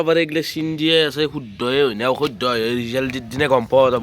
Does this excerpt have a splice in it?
no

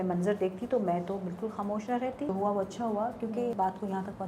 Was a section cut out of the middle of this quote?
yes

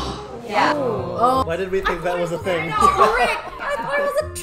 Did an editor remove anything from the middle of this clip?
yes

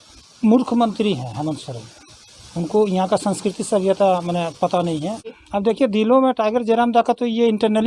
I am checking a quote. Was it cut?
yes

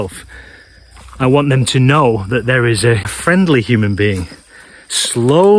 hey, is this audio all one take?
no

